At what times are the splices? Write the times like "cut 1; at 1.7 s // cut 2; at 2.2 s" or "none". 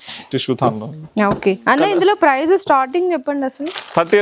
none